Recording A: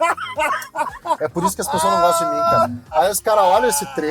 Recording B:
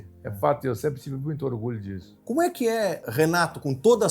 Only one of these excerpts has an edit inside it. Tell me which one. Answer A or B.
B